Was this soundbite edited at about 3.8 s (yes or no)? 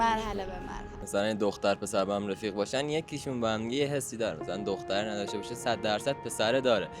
no